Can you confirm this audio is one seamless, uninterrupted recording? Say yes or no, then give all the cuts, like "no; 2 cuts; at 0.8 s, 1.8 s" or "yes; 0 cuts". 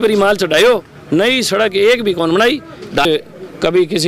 no; 1 cut; at 3.0 s